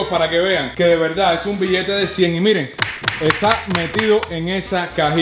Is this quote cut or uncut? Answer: uncut